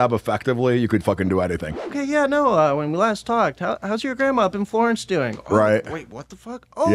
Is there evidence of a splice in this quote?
yes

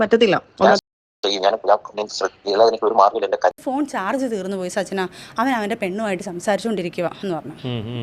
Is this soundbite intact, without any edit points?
no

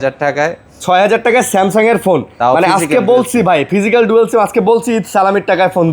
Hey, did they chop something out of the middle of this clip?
no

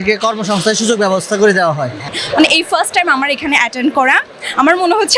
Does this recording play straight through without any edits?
no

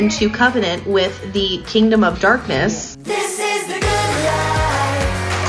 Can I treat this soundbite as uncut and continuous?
no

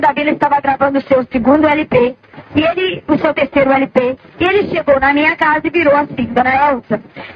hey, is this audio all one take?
yes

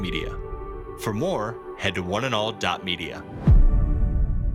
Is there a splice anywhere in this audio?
no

